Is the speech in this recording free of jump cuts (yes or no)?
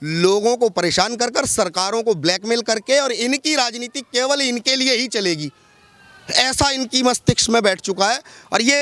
yes